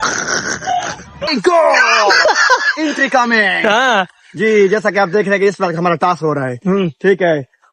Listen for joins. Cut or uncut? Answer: cut